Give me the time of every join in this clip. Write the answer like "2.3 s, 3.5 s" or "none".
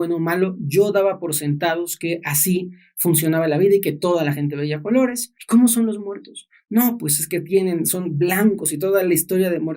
5.3 s